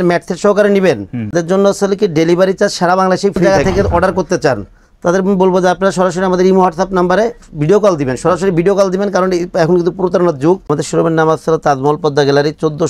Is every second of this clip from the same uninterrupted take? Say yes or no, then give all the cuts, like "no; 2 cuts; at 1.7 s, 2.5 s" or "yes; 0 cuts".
no; 2 cuts; at 3.4 s, 10.7 s